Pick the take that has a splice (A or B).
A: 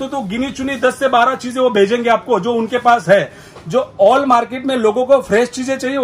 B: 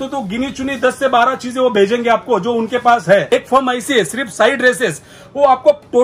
B